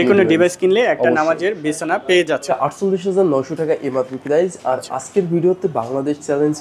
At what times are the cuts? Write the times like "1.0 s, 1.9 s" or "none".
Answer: 2.5 s